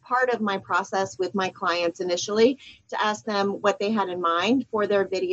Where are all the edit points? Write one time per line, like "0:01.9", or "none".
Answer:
none